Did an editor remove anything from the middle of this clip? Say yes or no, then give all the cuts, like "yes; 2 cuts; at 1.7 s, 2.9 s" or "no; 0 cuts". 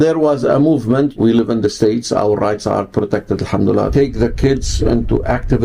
yes; 2 cuts; at 1.1 s, 3.9 s